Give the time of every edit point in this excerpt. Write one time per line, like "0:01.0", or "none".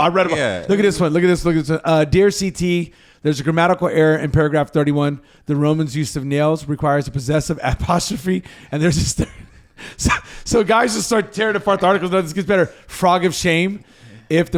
none